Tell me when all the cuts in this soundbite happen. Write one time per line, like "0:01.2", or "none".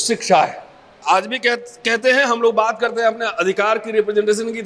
0:01.0